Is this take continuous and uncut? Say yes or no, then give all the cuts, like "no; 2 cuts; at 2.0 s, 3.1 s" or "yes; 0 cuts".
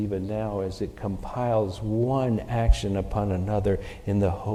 yes; 0 cuts